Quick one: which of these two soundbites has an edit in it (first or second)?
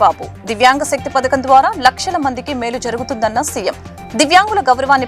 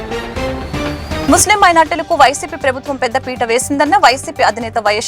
second